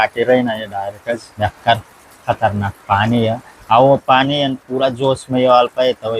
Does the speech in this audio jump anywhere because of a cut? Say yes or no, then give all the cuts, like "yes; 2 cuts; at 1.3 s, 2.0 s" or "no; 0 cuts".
yes; 2 cuts; at 1.3 s, 3.5 s